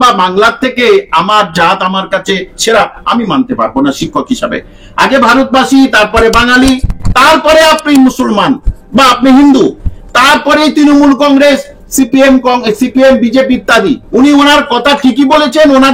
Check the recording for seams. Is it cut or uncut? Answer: uncut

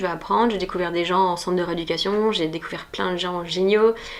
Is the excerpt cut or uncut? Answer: uncut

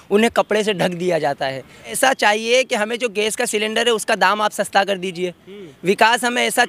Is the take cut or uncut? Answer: cut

